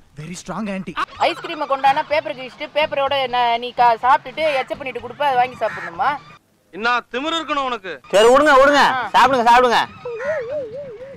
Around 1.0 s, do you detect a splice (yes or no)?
yes